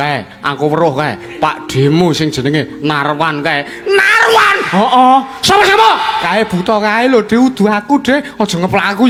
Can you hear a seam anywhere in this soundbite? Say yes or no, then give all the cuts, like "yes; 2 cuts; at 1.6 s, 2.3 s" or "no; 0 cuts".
no; 0 cuts